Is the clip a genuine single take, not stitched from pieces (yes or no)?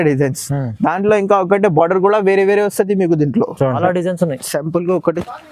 no